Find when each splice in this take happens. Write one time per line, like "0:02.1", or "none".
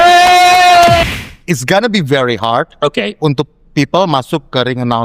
0:01.0